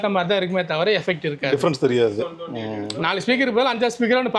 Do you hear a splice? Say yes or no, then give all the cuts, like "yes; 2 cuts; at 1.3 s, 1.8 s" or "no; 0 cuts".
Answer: no; 0 cuts